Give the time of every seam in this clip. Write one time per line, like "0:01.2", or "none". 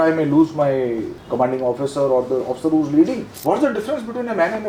0:01.2
0:03.3